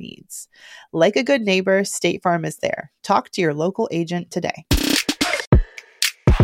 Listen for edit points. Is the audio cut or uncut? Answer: cut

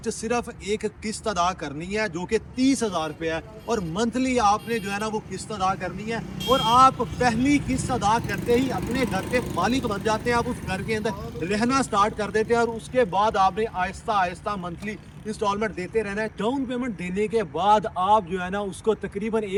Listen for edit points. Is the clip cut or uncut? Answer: uncut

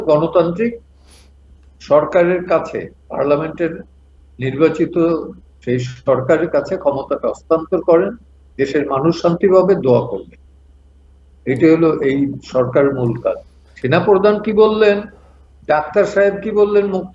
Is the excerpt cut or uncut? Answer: uncut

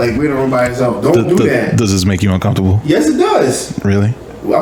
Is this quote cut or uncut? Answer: uncut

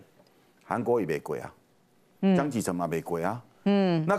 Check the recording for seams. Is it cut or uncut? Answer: uncut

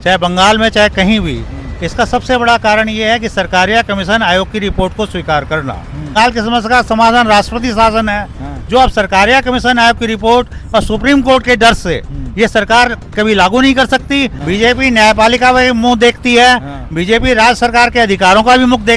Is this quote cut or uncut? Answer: cut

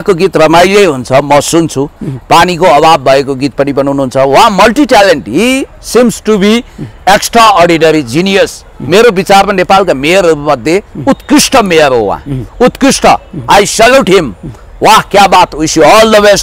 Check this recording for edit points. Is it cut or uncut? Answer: uncut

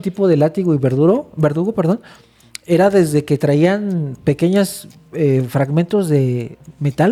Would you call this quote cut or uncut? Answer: uncut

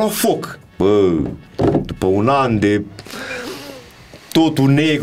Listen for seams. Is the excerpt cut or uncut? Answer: uncut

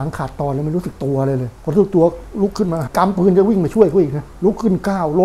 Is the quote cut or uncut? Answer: cut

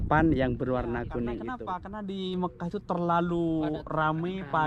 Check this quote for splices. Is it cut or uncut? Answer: cut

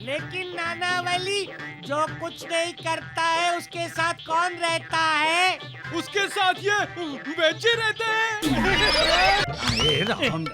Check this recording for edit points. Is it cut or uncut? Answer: cut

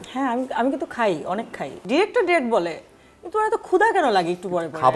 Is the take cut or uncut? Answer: cut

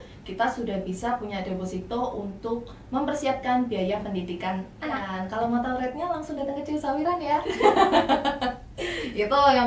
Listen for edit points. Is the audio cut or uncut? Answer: cut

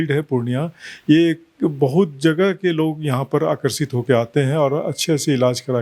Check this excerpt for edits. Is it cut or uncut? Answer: uncut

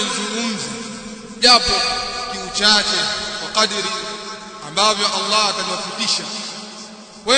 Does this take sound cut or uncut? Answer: cut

